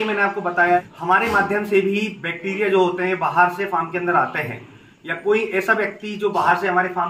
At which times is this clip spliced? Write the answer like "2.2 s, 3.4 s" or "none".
0.9 s